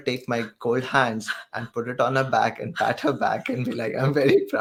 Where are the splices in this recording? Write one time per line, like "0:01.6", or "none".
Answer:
none